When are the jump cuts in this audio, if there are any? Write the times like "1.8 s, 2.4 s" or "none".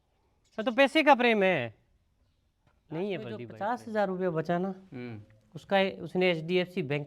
3.5 s